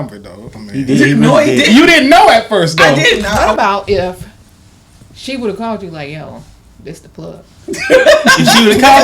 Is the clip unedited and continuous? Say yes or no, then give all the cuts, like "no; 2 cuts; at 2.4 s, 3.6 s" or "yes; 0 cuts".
no; 1 cut; at 3.4 s